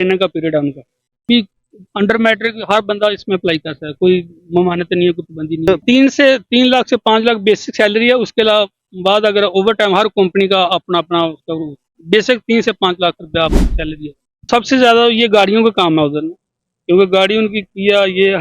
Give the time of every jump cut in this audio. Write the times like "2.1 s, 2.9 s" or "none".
1.3 s, 5.8 s, 14.5 s